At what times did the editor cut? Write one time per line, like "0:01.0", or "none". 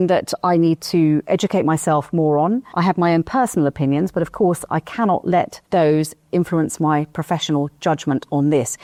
none

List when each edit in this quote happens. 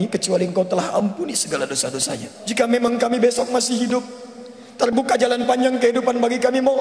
0:02.3

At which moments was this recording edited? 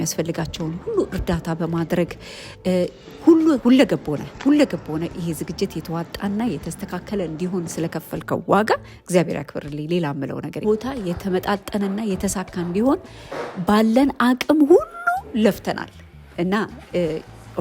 0:10.6

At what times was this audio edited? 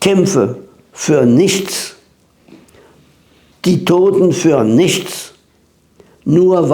0:03.5

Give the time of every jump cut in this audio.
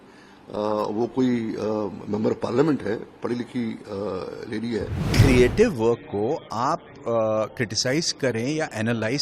0:05.0

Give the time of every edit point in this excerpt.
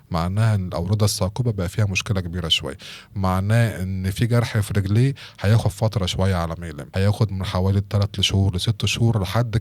0:06.8

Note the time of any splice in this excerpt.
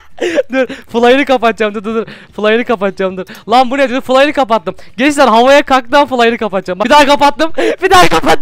0:06.7

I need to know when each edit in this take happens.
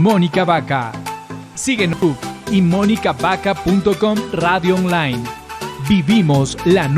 0:02.0

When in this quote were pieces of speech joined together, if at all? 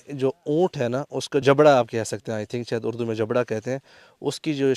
0:01.4

